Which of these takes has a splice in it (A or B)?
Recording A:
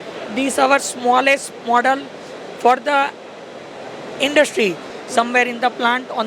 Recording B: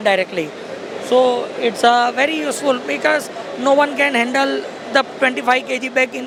A